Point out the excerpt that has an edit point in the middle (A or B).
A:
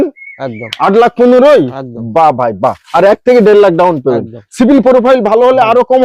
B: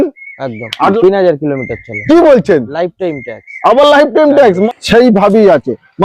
B